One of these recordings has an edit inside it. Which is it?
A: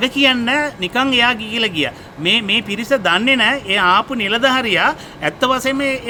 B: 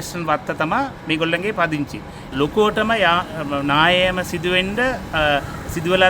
B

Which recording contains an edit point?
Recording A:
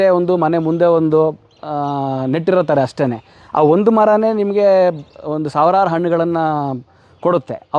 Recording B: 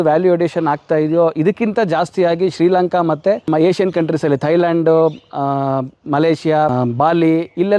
B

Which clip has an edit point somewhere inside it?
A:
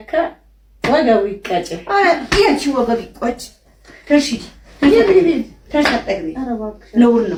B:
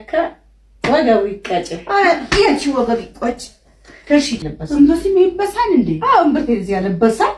B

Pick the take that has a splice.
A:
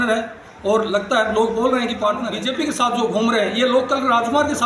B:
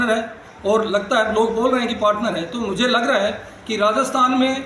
A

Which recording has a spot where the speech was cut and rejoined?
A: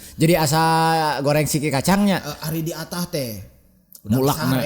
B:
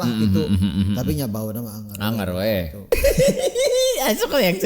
B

